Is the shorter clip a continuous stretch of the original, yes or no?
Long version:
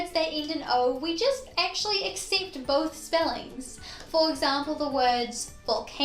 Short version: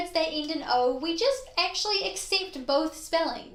yes